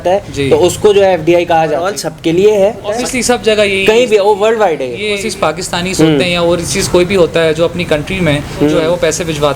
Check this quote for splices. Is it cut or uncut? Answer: cut